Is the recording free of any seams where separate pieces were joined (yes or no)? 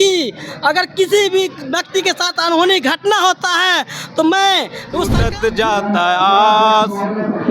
no